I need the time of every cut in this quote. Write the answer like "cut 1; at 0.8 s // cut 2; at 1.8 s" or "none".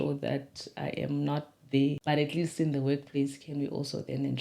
cut 1; at 2.0 s